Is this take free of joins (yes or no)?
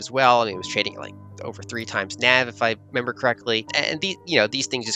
no